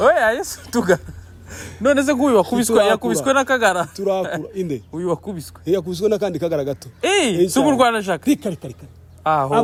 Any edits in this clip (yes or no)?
no